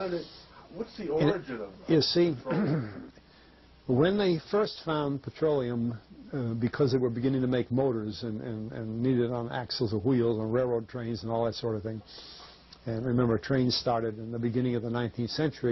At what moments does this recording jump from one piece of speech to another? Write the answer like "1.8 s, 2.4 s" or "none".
none